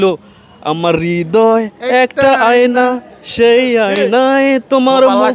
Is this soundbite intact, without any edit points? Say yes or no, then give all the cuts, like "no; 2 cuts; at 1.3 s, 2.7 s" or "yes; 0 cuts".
yes; 0 cuts